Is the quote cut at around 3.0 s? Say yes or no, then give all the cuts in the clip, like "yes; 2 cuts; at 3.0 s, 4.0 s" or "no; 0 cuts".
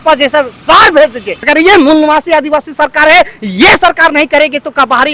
no; 1 cut; at 1.5 s